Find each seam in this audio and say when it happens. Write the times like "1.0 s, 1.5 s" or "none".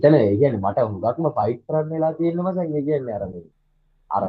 none